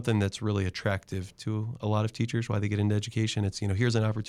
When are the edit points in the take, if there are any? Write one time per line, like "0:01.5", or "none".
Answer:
none